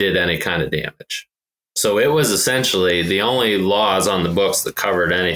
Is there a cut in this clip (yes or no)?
no